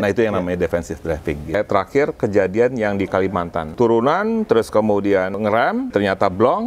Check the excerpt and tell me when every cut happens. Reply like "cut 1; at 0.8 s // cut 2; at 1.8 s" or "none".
cut 1; at 1.5 s // cut 2; at 3.7 s // cut 3; at 5.9 s

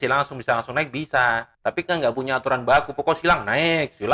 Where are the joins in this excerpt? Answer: cut 1; at 1.5 s

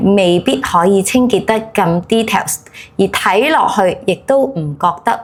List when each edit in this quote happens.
none

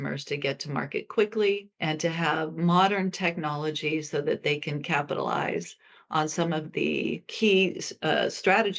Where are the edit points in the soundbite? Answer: cut 1; at 1.7 s // cut 2; at 7.3 s

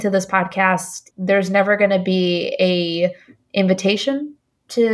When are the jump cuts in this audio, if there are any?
cut 1; at 1.0 s

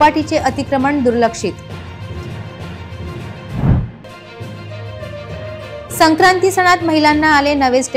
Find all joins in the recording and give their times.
none

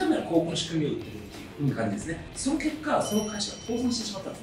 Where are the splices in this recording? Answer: cut 1; at 2.3 s

